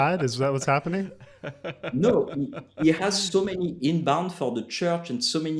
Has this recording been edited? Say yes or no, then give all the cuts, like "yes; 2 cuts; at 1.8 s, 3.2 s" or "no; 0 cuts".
no; 0 cuts